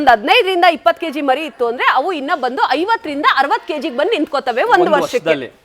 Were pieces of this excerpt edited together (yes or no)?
no